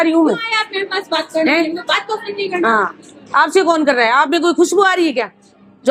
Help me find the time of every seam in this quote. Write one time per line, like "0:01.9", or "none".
none